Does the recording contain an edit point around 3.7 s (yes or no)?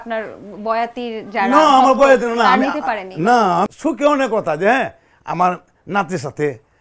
yes